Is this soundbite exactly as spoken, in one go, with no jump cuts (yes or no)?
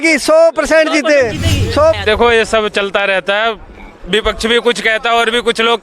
no